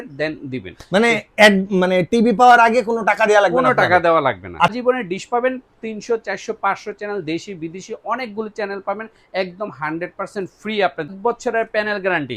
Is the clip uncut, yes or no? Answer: no